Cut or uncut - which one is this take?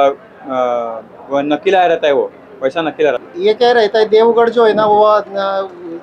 cut